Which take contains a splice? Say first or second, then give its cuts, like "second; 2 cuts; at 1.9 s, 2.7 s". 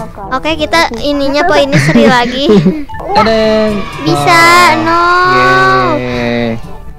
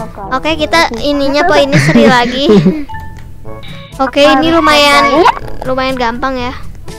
first; 1 cut; at 3.1 s